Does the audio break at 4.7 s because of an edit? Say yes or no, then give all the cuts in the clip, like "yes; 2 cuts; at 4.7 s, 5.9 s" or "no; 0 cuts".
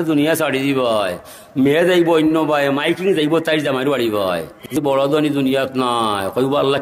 yes; 1 cut; at 4.7 s